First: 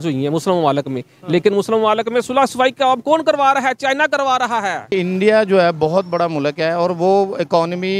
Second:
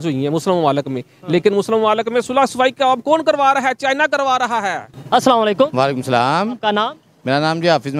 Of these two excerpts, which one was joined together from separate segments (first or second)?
first